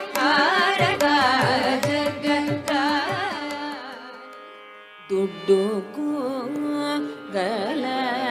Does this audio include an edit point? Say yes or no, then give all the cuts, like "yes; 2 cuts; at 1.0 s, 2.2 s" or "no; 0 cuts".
no; 0 cuts